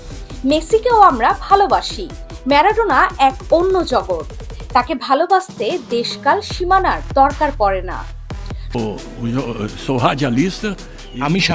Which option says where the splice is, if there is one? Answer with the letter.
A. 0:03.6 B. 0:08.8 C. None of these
B